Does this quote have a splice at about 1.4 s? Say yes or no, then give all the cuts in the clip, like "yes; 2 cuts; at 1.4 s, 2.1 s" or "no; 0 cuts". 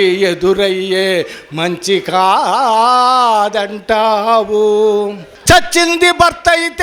no; 1 cut; at 5.3 s